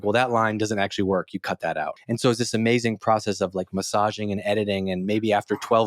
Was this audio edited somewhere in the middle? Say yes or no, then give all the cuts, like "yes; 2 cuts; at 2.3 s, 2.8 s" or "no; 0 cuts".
yes; 1 cut; at 1.9 s